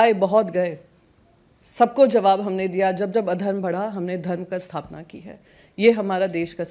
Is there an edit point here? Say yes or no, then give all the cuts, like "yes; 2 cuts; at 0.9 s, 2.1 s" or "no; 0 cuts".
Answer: no; 0 cuts